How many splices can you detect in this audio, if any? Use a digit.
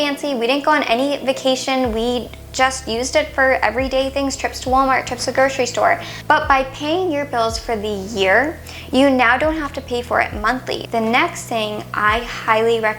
2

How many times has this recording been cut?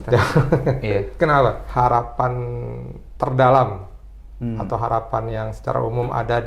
1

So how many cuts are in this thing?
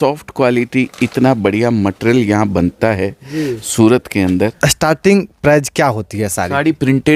1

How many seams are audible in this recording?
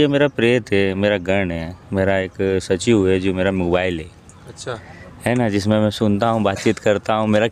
0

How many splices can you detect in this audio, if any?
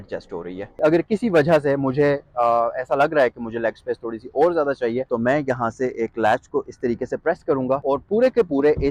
3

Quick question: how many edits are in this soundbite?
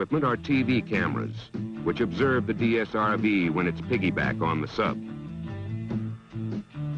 1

